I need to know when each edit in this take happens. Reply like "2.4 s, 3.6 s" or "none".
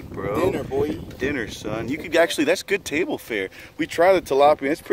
none